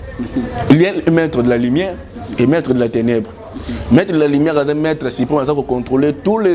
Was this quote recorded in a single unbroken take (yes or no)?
yes